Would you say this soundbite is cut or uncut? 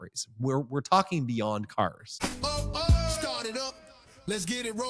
cut